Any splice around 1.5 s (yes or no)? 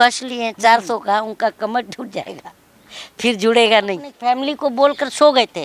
no